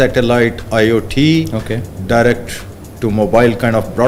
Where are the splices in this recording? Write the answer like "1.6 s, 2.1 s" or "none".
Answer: none